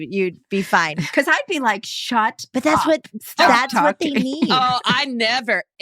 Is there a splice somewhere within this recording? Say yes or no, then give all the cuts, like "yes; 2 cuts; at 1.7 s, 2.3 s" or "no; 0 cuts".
yes; 1 cut; at 1.0 s